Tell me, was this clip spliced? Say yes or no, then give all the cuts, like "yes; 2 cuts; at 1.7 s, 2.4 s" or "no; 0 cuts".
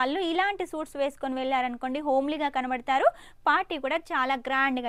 no; 0 cuts